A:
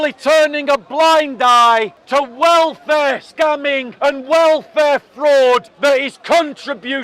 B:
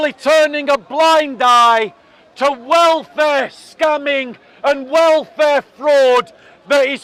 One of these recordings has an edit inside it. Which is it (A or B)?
A